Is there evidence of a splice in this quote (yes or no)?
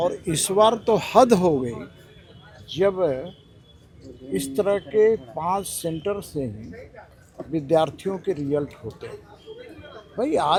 no